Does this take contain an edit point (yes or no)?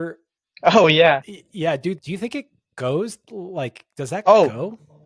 yes